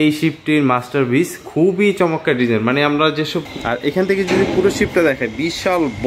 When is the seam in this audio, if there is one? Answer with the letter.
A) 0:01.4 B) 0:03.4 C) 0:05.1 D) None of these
B